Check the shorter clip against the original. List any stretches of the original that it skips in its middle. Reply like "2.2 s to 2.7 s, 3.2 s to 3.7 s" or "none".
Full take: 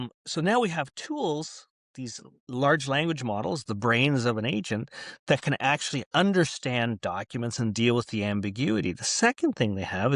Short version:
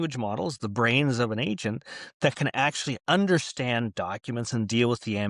none